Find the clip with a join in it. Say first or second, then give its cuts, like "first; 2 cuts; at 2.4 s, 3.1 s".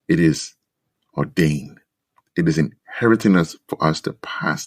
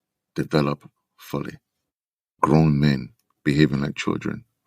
second; 1 cut; at 2.2 s